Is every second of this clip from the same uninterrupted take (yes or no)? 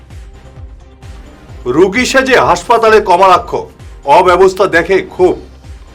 no